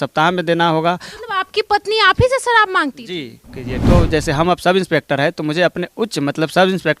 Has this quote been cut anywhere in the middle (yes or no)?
yes